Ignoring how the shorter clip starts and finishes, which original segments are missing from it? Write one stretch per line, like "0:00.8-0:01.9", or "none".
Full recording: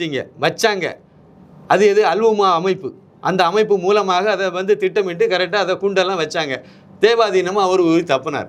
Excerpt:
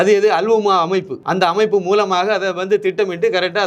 0:02.9-0:03.1